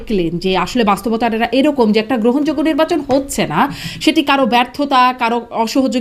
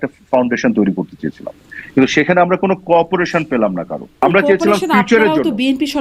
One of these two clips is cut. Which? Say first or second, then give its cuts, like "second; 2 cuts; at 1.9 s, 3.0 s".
second; 1 cut; at 4.2 s